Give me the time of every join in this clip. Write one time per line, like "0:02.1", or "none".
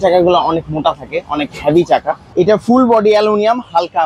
0:02.3